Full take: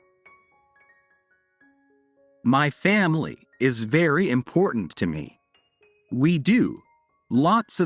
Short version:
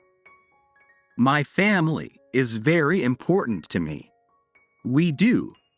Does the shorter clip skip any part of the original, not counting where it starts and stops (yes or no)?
yes